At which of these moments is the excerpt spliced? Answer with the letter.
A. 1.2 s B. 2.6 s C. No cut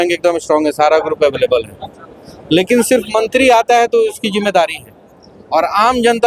C